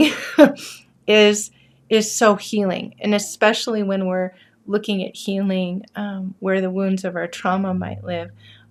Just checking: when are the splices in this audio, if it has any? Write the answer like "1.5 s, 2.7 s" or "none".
none